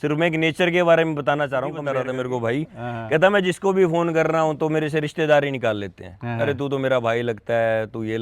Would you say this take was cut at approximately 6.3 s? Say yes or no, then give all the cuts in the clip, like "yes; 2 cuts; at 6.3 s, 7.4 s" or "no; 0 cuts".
no; 1 cut; at 1.8 s